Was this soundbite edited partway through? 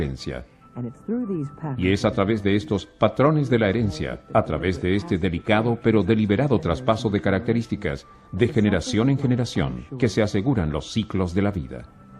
yes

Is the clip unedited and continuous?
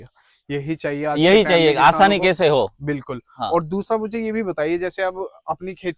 yes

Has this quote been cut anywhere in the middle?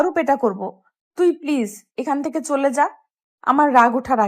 no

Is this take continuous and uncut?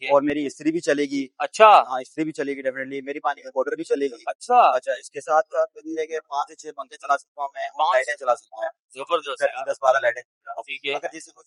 yes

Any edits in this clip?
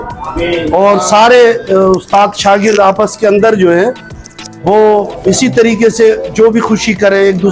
no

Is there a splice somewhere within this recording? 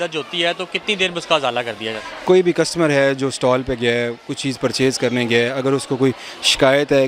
no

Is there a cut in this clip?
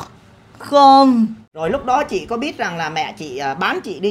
yes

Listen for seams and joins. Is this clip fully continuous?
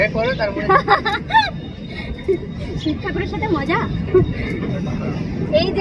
yes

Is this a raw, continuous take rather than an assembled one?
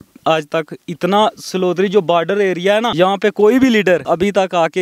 no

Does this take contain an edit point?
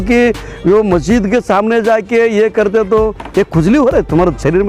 no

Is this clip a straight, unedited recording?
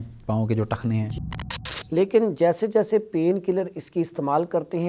no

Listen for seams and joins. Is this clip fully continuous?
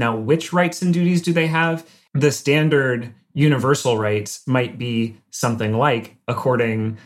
no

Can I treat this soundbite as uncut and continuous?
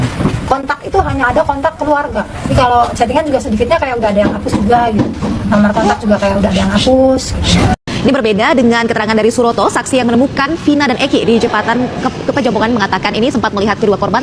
no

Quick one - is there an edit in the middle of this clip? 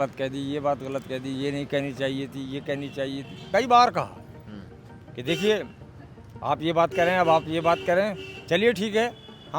yes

